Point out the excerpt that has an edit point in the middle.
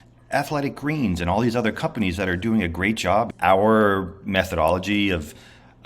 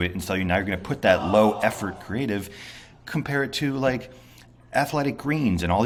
first; 1 cut; at 3.3 s

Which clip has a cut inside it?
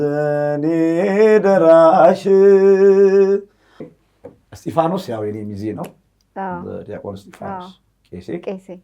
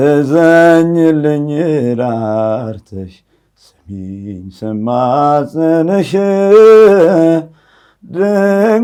first; 1 cut; at 4.0 s

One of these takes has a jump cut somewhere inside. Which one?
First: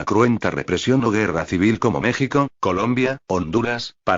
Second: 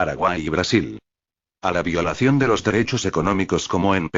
second; 1 cut; at 1.7 s

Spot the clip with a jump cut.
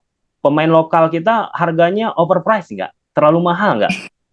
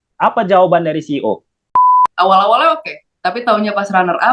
second; 1 cut; at 2.1 s

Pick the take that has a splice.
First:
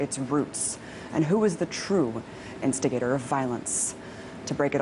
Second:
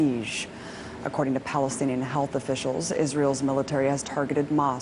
second; 1 cut; at 1.8 s

